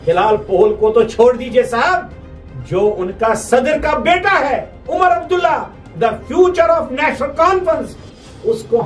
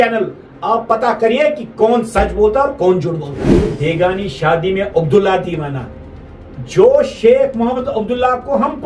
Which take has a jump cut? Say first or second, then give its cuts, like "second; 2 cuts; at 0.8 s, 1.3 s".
second; 1 cut; at 3.7 s